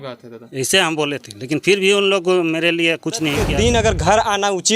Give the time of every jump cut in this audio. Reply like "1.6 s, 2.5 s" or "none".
3.4 s